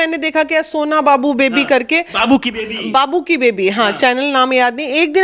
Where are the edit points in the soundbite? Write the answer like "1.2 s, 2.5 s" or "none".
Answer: none